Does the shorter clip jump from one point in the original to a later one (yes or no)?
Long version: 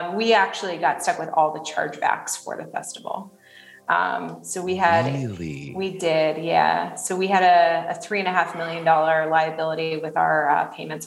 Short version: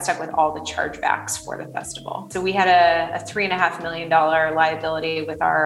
yes